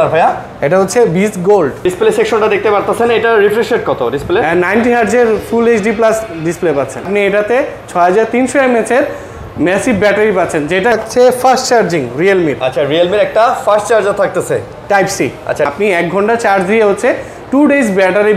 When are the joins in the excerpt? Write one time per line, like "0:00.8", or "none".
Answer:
0:01.8
0:07.0
0:10.9
0:15.7